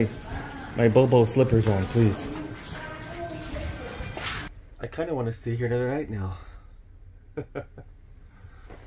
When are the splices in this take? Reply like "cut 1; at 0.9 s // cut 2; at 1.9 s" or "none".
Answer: cut 1; at 4.5 s